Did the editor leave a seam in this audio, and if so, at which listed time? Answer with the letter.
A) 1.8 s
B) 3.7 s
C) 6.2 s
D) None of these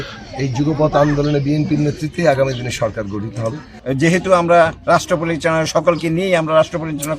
B